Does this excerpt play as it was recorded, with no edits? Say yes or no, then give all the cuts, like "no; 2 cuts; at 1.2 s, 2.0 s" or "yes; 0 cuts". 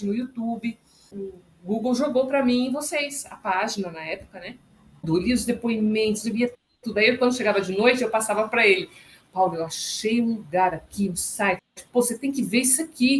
no; 2 cuts; at 1.2 s, 5.0 s